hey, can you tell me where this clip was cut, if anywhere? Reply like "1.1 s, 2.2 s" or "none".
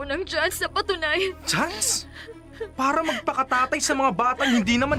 none